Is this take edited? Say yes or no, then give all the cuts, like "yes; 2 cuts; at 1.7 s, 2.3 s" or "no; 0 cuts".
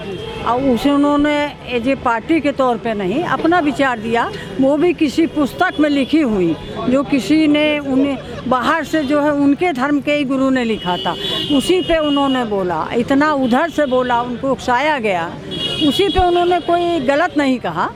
no; 0 cuts